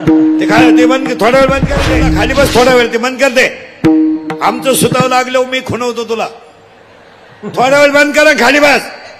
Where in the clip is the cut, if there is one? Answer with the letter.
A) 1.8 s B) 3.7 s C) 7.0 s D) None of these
A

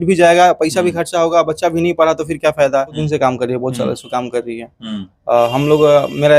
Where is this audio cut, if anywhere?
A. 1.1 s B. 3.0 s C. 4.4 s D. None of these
B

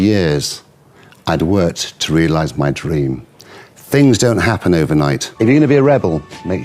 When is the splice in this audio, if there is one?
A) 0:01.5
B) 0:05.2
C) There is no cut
B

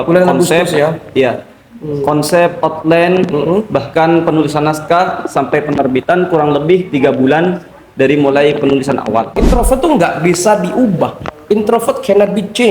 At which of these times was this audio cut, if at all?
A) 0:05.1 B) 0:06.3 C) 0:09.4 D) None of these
C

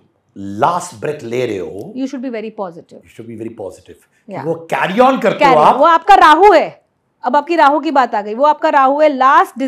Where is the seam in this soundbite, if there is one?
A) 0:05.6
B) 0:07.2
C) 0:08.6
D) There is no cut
D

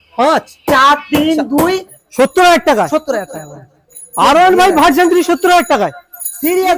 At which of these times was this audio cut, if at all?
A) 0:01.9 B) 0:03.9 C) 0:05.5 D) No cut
A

